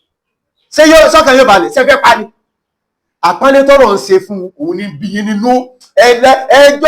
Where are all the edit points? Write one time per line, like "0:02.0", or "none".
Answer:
none